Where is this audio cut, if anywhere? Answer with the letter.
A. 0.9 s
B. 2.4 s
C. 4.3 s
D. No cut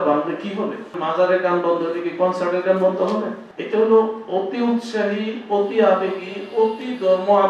A